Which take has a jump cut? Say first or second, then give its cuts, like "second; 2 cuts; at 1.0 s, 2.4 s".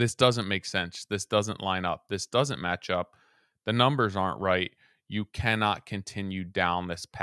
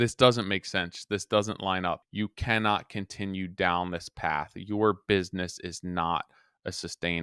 second; 1 cut; at 2.0 s